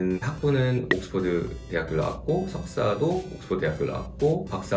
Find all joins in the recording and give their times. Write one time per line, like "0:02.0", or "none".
none